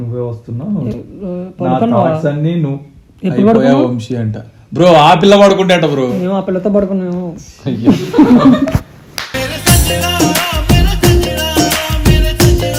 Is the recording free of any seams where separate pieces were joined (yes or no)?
yes